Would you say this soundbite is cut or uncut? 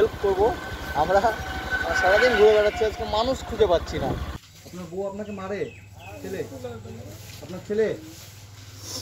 cut